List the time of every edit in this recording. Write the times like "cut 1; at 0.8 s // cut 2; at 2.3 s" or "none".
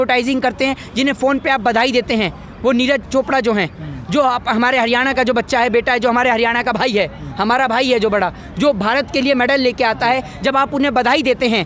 none